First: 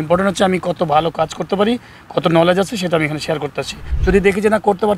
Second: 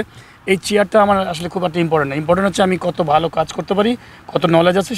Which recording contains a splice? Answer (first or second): first